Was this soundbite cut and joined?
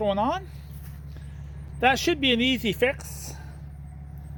no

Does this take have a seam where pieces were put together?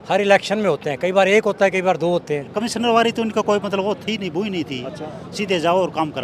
yes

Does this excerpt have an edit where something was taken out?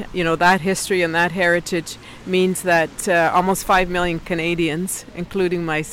no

